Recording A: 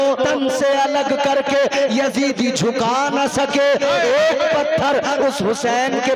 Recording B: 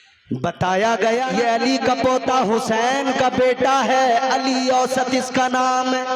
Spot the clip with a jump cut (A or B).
B